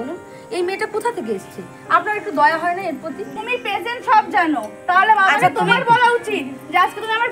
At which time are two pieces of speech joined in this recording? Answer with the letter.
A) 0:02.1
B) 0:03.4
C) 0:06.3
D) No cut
B